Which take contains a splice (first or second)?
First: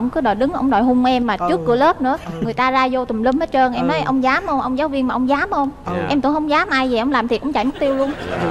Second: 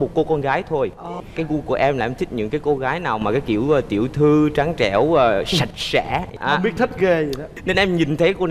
second